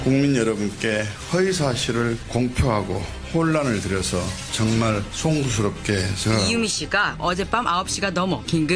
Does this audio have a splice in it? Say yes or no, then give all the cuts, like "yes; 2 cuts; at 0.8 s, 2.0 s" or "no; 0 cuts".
no; 0 cuts